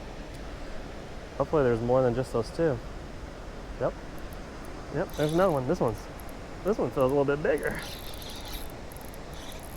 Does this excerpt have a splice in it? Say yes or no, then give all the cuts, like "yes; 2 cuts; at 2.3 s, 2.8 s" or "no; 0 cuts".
yes; 2 cuts; at 1.4 s, 3.7 s